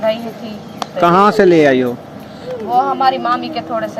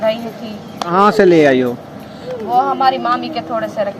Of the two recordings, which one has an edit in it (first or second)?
second